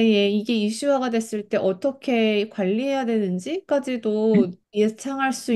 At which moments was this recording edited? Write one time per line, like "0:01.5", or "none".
0:04.6